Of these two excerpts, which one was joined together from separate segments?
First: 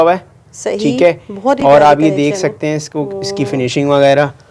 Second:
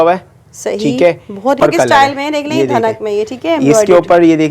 second; 1 cut; at 1.6 s

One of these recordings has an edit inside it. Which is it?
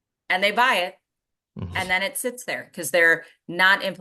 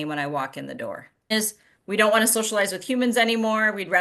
second; 1 cut; at 1.3 s

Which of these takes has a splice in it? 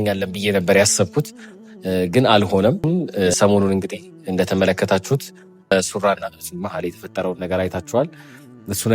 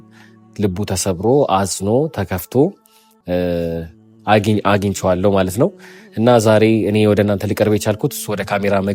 first; 1 cut; at 2.9 s

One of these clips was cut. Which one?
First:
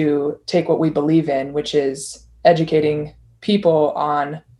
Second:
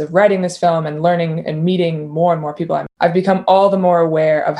second; 1 cut; at 2.9 s

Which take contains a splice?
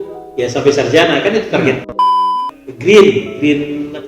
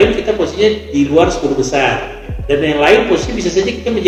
first; 1 cut; at 2.1 s

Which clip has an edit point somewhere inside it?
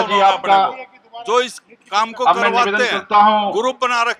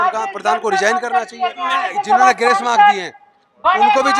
second; 1 cut; at 1.9 s

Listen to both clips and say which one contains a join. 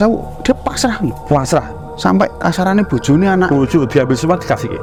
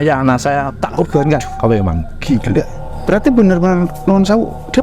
second; 1 cut; at 2.8 s

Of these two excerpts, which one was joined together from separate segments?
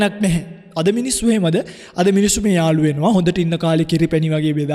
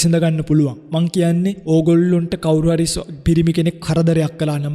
second; 1 cut; at 1.6 s

